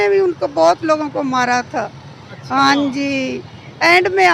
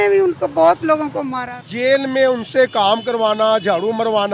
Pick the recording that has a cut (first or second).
second